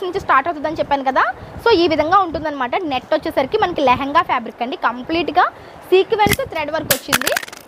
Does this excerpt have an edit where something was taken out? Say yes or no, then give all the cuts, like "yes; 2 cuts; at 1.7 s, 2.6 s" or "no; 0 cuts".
no; 0 cuts